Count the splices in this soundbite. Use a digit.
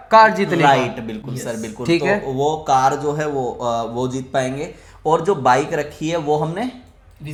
0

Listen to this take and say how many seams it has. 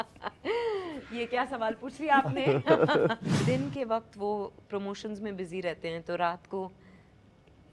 1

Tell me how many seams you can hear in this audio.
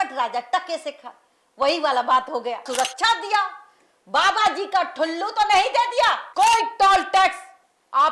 2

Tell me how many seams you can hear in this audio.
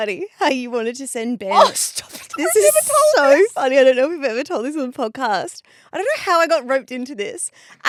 0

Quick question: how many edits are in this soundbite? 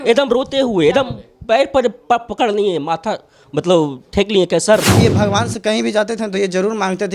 1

